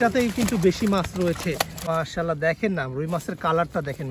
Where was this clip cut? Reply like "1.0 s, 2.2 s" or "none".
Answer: 1.8 s